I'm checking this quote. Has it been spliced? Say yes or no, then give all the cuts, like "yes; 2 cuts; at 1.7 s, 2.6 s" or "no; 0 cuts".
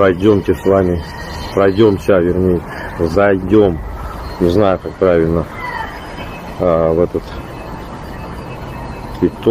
no; 0 cuts